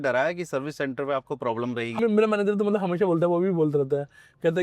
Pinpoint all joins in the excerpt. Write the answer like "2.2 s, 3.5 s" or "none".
2.0 s